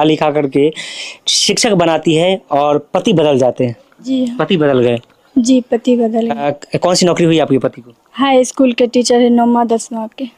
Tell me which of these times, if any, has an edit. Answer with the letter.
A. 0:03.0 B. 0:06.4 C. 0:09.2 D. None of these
D